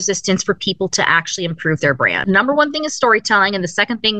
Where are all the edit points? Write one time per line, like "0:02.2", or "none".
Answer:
0:02.2

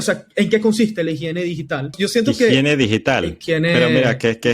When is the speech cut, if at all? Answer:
0:01.9
0:03.4

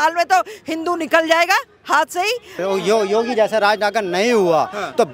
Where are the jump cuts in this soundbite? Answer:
0:02.5

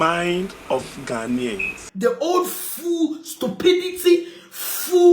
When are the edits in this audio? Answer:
0:01.8

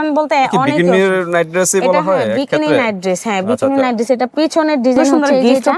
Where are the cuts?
none

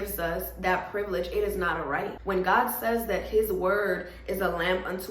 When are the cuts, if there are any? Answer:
0:02.2

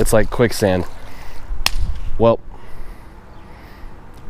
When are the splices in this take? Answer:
none

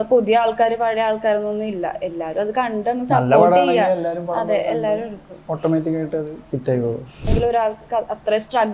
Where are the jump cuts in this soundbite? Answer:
0:07.3

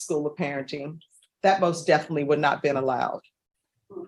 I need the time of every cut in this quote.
none

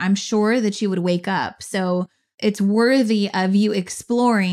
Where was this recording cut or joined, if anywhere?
0:02.3

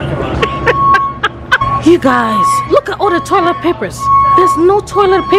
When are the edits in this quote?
0:01.7

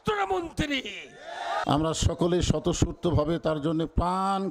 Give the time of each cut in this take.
0:01.6

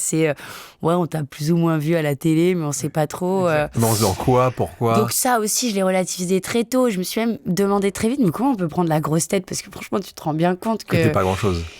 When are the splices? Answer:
none

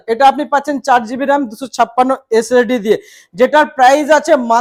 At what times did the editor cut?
none

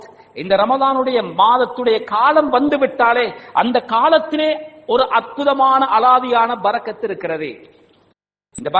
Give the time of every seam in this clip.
none

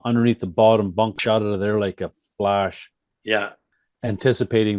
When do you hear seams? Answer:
0:01.2
0:03.7

